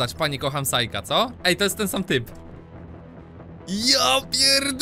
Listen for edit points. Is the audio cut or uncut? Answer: uncut